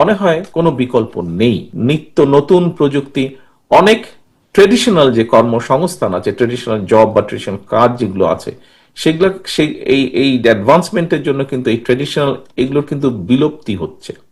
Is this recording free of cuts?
no; 1 cut; at 1.7 s

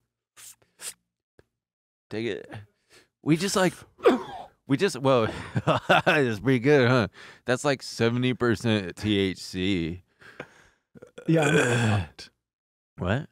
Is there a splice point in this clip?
no; 0 cuts

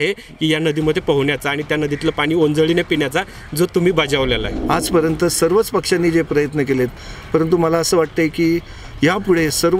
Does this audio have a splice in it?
yes; 1 cut; at 4.5 s

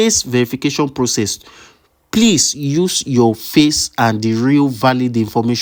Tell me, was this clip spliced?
no; 0 cuts

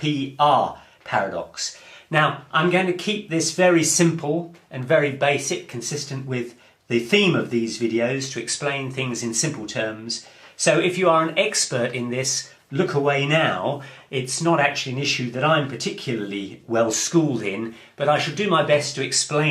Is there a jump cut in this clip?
yes; 1 cut; at 11.1 s

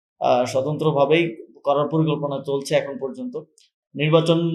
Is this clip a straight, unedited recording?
yes; 0 cuts

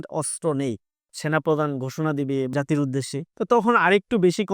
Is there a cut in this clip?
yes; 2 cuts; at 1.1 s, 3.2 s

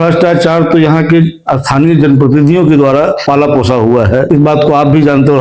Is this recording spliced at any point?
no; 0 cuts

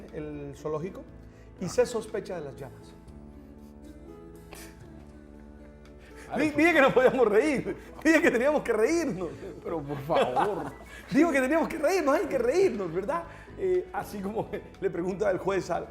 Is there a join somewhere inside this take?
yes; 1 cut; at 0.9 s

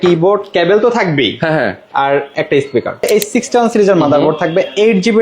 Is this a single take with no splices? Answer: no; 1 cut; at 3.1 s

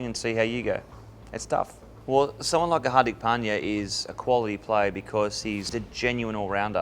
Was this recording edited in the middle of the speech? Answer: yes; 2 cuts; at 2.0 s, 5.7 s

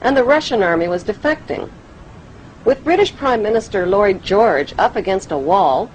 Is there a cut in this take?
yes; 1 cut; at 2.6 s

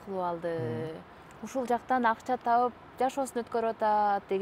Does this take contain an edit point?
no; 0 cuts

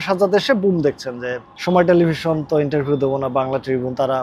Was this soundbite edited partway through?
no; 0 cuts

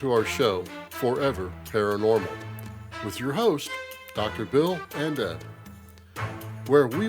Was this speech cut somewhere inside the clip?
yes; 1 cut; at 1.5 s

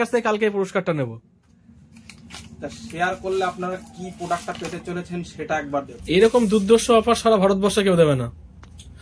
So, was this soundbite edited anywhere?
yes; 1 cut; at 6.0 s

